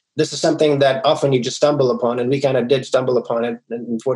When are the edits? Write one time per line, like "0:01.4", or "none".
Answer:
none